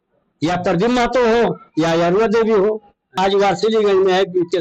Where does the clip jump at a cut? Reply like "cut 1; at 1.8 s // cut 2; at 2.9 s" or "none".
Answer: cut 1; at 3.1 s